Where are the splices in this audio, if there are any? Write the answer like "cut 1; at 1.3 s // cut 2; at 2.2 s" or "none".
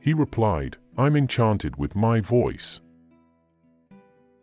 cut 1; at 2.6 s